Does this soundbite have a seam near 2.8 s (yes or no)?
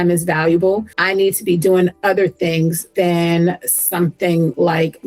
yes